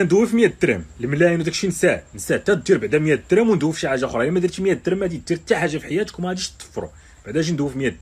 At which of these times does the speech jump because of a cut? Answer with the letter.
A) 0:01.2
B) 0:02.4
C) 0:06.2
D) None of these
D